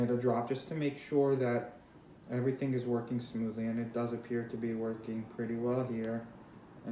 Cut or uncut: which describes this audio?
uncut